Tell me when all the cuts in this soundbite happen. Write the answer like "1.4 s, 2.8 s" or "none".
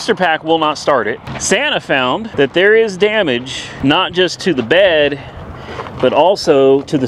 1.3 s, 2.3 s, 3.6 s